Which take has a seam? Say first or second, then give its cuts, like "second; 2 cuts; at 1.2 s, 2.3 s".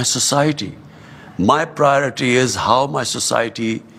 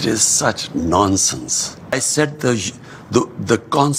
second; 1 cut; at 1.9 s